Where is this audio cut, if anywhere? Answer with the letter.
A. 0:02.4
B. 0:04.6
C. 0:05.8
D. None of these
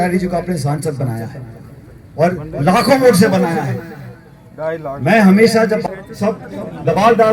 C